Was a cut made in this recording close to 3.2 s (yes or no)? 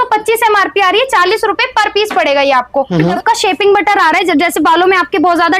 yes